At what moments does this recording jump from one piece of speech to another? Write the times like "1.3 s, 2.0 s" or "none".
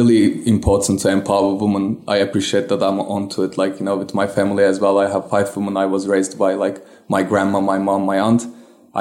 none